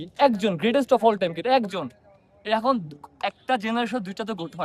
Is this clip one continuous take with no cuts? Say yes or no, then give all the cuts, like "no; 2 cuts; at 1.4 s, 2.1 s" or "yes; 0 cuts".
yes; 0 cuts